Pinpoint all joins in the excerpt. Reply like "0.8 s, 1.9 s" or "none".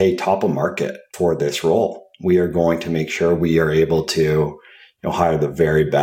1.1 s